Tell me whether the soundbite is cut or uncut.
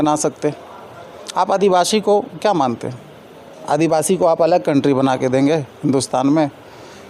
uncut